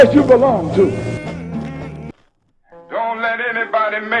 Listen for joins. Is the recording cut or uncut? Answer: cut